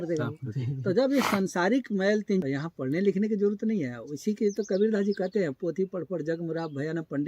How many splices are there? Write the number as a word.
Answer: one